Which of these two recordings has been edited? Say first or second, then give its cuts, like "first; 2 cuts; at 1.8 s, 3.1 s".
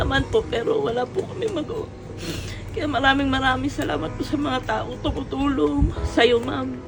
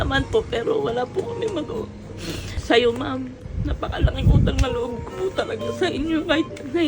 second; 1 cut; at 2.5 s